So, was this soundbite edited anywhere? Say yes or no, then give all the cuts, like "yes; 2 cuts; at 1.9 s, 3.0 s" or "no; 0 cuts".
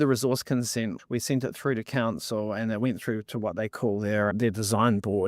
yes; 2 cuts; at 1.0 s, 4.3 s